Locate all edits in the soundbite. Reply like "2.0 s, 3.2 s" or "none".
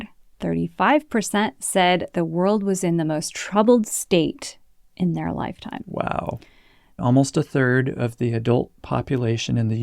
7.0 s